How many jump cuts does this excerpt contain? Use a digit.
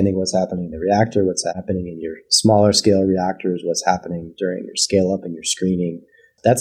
1